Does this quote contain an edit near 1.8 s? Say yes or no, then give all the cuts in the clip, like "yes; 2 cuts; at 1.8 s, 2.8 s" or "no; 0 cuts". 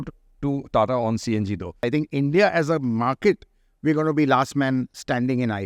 yes; 1 cut; at 1.8 s